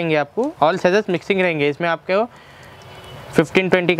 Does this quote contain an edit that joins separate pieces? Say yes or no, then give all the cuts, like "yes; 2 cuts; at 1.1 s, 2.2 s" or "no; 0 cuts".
no; 0 cuts